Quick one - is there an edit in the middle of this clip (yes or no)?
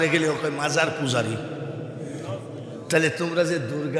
no